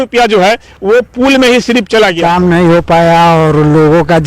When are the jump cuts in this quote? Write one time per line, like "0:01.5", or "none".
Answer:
0:02.2